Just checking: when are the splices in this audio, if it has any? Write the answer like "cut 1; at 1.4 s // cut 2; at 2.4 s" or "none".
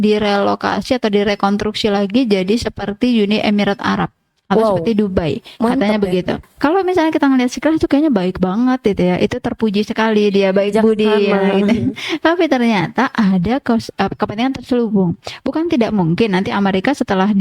cut 1; at 6.5 s